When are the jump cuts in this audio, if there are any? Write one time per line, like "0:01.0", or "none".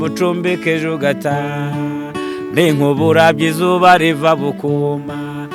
none